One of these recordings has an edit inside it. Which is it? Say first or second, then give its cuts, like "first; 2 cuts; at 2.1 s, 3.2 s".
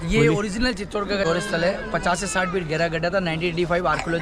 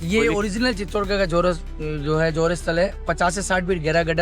first; 1 cut; at 1.2 s